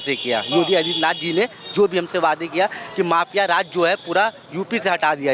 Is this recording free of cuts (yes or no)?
yes